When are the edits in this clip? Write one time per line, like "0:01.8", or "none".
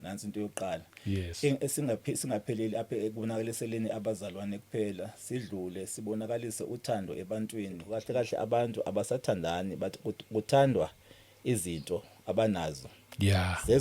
0:07.9

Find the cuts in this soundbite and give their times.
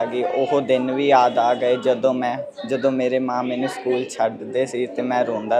none

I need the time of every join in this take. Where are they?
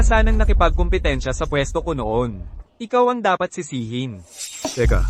none

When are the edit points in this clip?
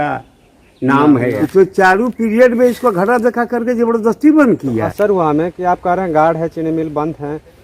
0:01.4
0:04.8

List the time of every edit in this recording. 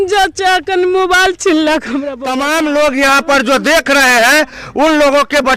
0:02.1

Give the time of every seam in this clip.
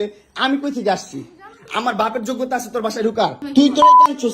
0:03.4

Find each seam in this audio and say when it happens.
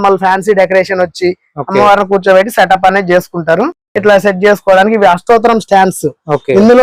none

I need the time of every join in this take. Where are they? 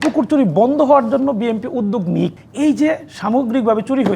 0:02.4

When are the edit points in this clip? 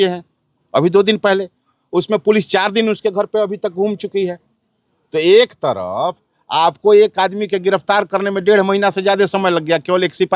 none

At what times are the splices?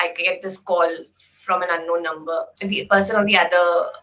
0:02.6

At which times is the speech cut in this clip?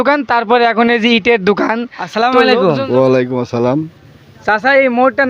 0:02.3

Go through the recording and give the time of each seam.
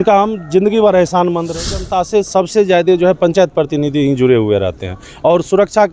0:01.6

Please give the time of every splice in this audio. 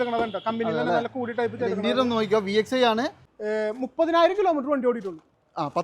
0:03.3

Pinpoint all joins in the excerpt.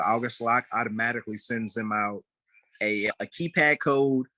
0:03.1

